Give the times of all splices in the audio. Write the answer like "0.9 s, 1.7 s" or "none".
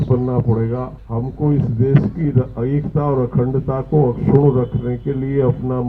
1.0 s